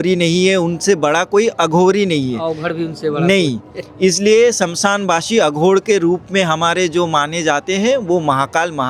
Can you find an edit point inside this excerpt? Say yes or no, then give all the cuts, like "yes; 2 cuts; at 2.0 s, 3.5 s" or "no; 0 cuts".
no; 0 cuts